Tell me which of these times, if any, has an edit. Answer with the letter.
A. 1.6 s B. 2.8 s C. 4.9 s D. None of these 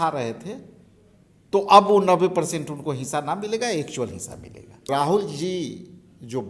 C